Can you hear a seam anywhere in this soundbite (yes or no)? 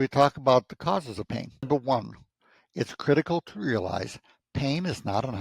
yes